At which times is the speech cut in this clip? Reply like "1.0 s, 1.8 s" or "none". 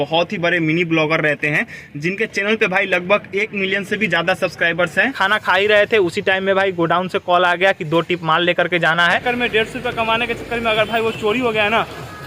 5.1 s, 9.2 s